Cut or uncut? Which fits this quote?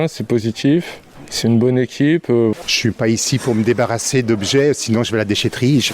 cut